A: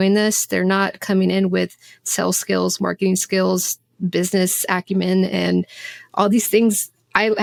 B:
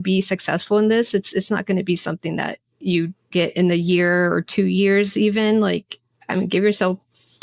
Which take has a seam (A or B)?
B